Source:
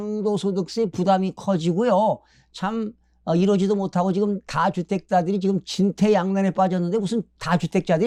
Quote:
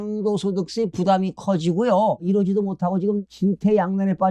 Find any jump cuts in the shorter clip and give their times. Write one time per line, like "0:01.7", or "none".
0:02.2
0:03.3